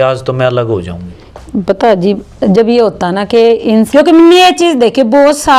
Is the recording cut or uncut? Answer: cut